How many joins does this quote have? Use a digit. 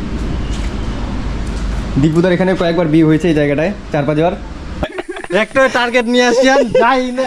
1